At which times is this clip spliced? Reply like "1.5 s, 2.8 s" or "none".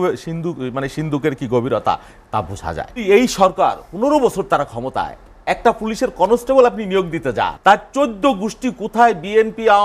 3.0 s, 7.5 s